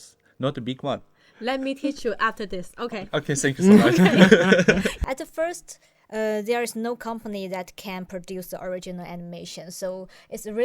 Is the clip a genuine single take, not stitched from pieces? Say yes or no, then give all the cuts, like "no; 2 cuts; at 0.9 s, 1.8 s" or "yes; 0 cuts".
no; 1 cut; at 5.0 s